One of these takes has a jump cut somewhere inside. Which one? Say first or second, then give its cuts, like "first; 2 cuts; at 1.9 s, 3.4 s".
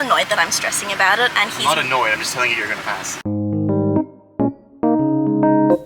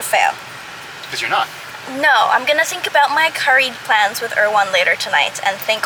first; 1 cut; at 3.1 s